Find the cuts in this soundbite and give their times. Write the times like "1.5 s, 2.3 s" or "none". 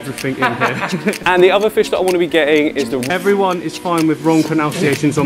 1.2 s, 3.1 s